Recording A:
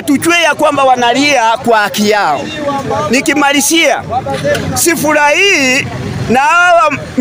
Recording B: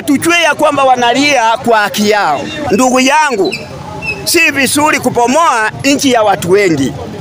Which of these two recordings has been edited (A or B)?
B